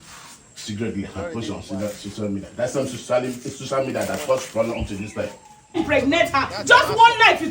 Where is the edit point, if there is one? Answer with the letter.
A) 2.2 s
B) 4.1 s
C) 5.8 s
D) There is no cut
C